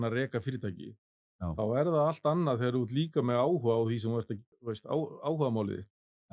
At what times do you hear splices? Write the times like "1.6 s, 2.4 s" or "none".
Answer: 4.5 s